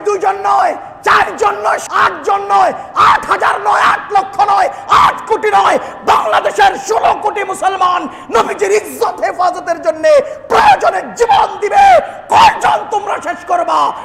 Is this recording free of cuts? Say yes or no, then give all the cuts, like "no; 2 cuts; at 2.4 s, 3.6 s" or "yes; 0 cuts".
no; 1 cut; at 1.8 s